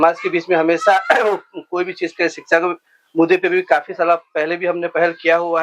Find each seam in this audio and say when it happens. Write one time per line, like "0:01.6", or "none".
none